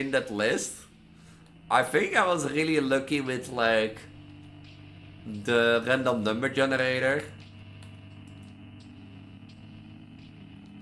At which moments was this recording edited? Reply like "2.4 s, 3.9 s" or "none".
none